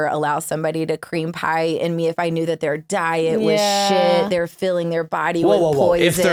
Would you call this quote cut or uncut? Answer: uncut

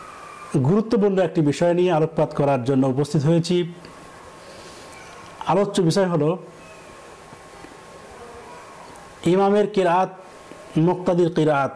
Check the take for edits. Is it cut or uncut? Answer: uncut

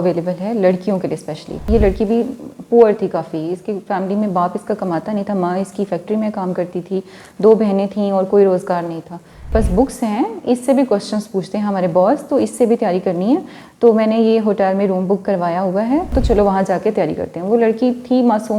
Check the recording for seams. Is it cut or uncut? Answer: cut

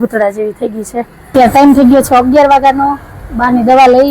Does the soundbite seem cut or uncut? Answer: cut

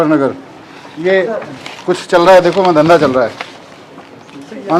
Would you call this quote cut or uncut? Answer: uncut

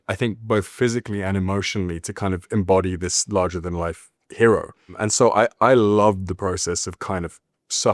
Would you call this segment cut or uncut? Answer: uncut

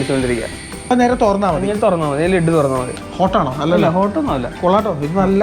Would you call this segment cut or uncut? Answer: cut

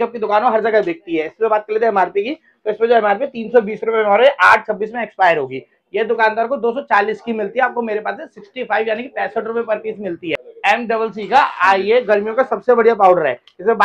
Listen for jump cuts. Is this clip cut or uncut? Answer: cut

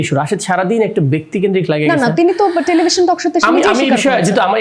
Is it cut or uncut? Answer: uncut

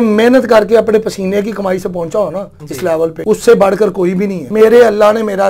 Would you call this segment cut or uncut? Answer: cut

